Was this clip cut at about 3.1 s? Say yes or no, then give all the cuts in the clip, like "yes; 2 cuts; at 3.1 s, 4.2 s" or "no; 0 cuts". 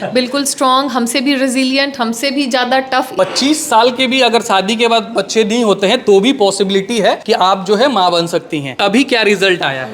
yes; 3 cuts; at 3.1 s, 7.2 s, 8.7 s